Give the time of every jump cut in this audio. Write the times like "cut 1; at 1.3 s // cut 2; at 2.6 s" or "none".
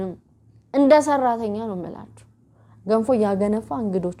none